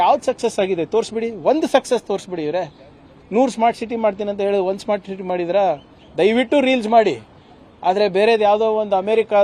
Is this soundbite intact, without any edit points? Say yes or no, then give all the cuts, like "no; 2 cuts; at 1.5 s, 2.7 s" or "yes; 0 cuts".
yes; 0 cuts